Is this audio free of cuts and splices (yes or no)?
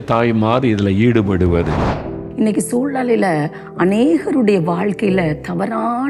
no